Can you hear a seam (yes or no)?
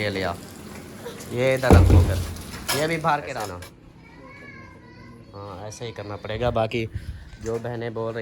yes